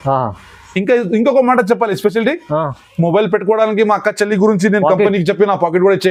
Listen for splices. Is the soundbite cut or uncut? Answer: uncut